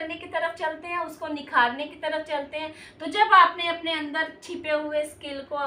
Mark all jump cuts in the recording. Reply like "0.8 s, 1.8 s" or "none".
none